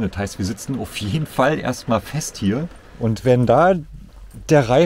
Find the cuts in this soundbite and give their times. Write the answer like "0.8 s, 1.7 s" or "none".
2.8 s